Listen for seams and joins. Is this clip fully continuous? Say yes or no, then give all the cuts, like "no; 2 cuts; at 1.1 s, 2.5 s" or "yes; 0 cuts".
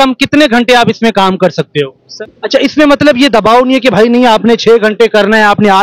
no; 1 cut; at 2.0 s